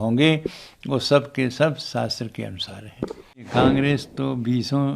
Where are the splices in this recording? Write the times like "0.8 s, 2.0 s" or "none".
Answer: 3.5 s

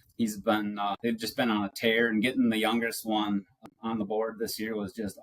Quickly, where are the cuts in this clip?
1.0 s, 3.6 s

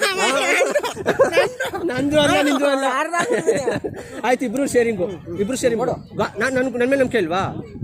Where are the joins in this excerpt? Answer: none

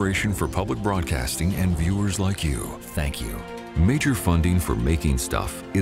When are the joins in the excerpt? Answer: 3.7 s

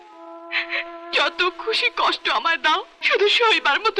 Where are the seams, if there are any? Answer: 2.9 s

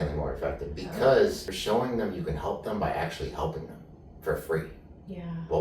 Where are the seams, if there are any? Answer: 1.5 s

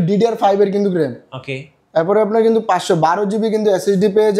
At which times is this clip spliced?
none

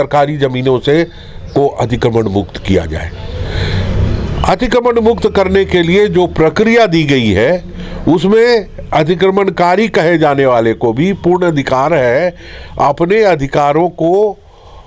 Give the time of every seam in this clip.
none

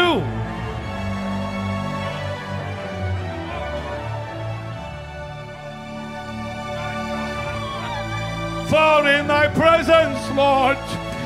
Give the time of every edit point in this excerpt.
5.5 s

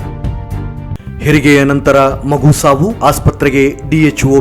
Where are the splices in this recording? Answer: none

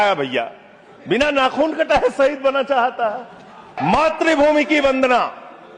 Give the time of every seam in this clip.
3.7 s

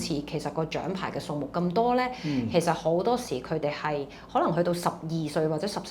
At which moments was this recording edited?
none

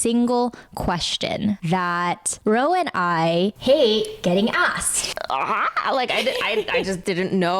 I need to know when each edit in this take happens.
1.6 s, 5.0 s

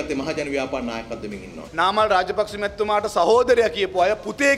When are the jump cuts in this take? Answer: 1.6 s

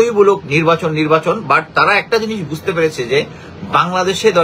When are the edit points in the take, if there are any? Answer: none

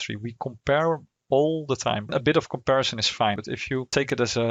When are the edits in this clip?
2.1 s, 3.4 s

